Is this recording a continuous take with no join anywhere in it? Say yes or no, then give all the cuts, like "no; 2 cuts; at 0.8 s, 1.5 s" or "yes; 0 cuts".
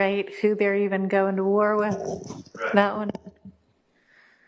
yes; 0 cuts